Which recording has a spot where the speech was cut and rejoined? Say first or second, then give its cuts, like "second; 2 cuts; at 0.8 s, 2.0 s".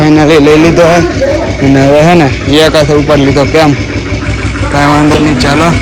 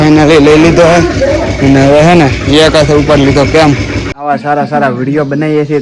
second; 1 cut; at 4.2 s